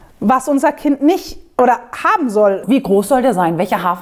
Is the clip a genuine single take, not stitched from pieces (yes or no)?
no